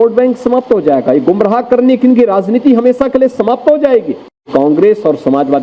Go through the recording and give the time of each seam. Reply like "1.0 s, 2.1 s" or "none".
4.5 s